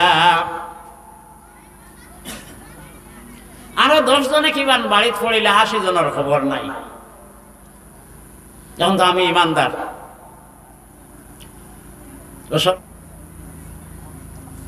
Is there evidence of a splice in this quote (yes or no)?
yes